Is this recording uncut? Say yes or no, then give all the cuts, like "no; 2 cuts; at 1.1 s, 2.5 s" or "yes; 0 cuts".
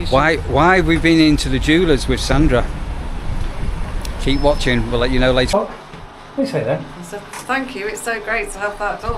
no; 1 cut; at 5.5 s